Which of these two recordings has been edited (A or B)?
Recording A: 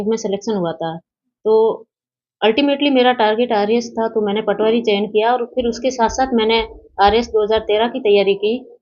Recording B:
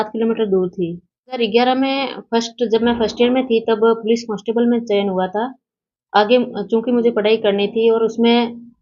B